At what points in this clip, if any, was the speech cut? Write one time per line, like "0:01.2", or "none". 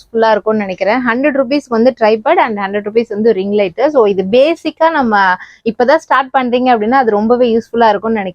none